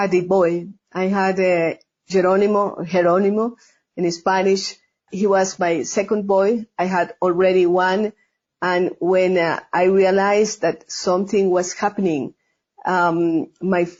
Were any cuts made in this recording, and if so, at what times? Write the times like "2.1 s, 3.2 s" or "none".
none